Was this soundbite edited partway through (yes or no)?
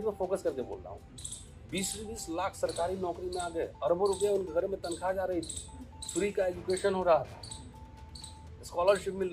no